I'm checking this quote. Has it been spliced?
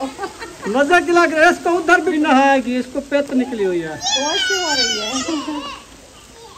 yes; 1 cut; at 2.1 s

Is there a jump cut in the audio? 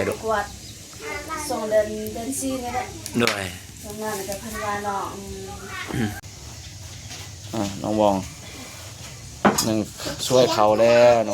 yes; 1 cut; at 6.3 s

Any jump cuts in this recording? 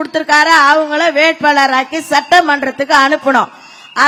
no; 0 cuts

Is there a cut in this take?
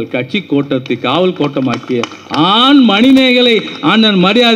no; 0 cuts

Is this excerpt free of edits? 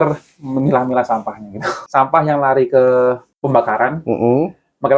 no; 2 cuts; at 1.7 s, 3.3 s

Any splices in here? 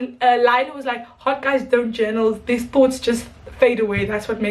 no; 0 cuts

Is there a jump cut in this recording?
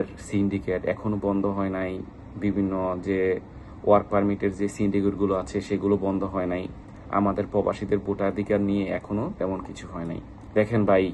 no; 0 cuts

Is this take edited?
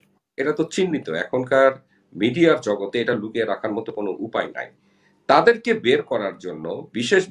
no; 0 cuts

